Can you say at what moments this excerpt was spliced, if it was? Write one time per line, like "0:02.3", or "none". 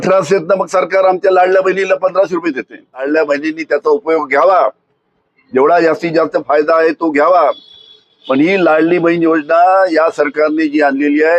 0:03.1